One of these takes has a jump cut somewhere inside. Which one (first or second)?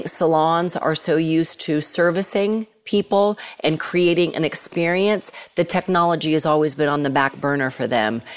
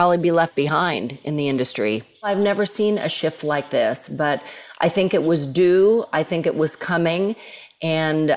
second